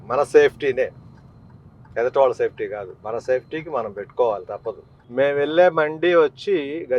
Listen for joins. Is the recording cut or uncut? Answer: cut